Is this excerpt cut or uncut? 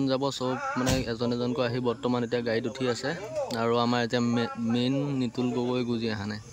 uncut